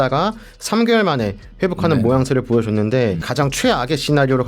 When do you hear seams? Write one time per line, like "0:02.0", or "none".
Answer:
0:03.3